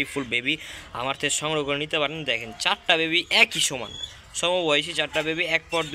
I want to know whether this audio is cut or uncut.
uncut